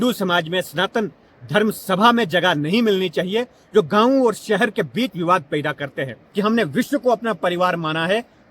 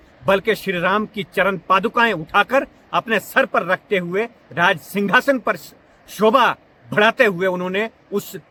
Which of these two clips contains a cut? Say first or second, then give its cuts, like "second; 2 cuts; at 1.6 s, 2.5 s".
first; 1 cut; at 6.2 s